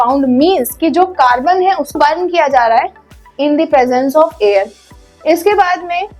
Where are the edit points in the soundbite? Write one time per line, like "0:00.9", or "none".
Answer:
0:01.9